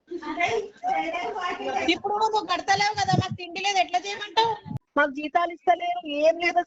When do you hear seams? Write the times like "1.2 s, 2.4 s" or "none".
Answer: 4.7 s